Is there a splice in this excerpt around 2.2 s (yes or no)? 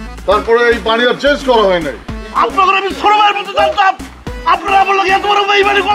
yes